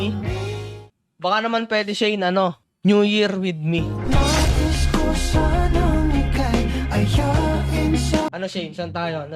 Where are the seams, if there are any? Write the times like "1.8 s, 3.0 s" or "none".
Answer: 8.3 s